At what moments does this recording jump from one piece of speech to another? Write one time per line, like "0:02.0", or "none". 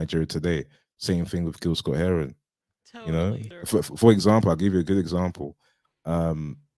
0:03.5